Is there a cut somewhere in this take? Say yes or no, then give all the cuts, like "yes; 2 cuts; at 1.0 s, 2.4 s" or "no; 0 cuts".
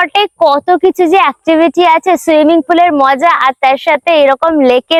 no; 0 cuts